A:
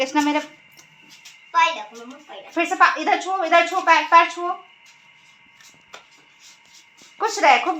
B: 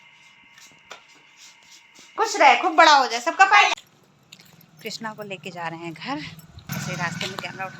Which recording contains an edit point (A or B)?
B